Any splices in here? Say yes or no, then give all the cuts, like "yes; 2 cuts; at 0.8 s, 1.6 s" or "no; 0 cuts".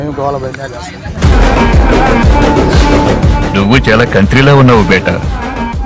no; 0 cuts